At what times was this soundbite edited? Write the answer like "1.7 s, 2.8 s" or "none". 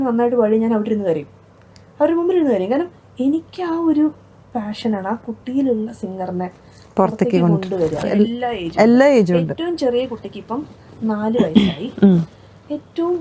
8.1 s